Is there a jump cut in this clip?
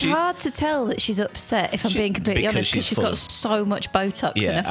no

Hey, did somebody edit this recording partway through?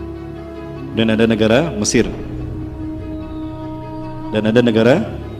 no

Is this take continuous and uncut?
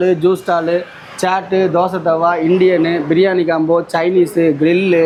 yes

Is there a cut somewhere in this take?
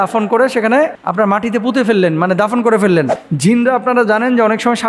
yes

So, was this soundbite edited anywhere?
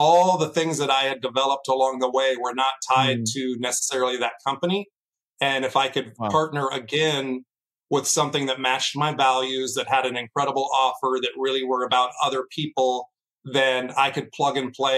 no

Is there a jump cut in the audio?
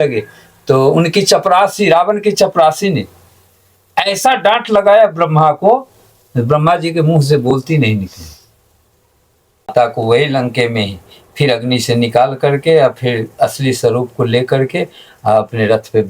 yes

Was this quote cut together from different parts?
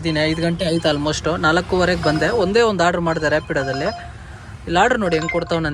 no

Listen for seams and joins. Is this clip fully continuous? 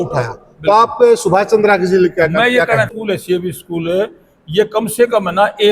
no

